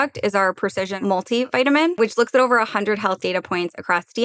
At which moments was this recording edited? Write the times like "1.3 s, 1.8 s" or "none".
1.0 s, 1.9 s